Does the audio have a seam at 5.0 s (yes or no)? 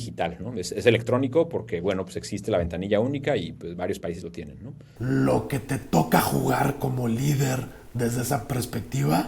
yes